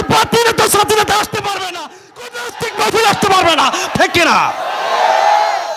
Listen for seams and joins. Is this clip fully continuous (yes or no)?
no